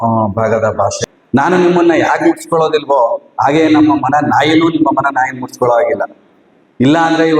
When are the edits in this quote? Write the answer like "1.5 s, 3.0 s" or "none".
1.2 s

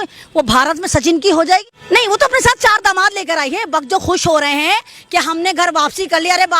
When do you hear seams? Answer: 1.7 s

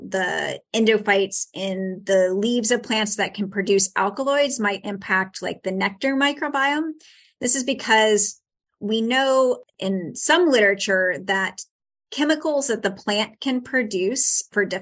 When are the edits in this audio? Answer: 9.7 s

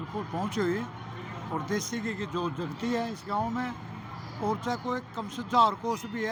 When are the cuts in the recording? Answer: none

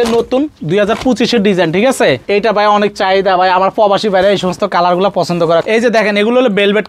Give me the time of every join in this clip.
2.2 s, 5.6 s

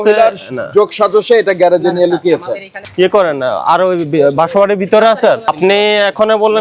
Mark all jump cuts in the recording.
2.8 s, 5.5 s

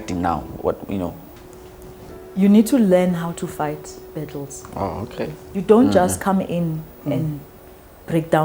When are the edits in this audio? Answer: 1.2 s

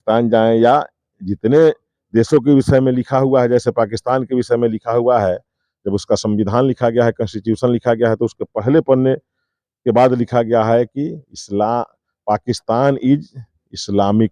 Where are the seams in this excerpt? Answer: none

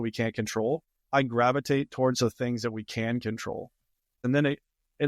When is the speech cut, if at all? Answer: 0.9 s, 4.2 s

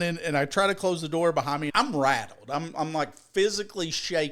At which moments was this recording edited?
1.7 s

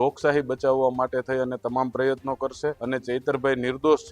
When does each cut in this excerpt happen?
2.8 s

